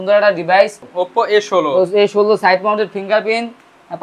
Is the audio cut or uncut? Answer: cut